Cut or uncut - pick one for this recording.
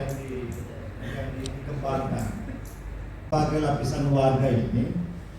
cut